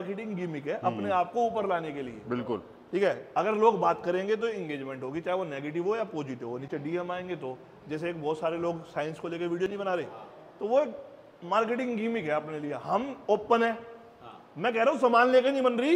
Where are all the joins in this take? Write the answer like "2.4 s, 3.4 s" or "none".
none